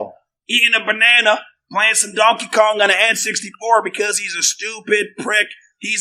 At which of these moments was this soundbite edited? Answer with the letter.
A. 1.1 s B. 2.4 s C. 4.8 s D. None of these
D